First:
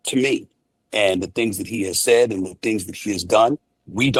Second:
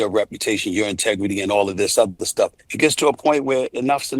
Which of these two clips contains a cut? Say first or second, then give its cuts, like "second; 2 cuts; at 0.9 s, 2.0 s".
second; 1 cut; at 2.6 s